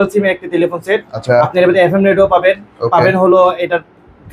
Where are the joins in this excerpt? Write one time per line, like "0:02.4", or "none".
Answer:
none